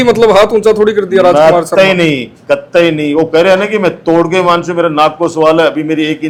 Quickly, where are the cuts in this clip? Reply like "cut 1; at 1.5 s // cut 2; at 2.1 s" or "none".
none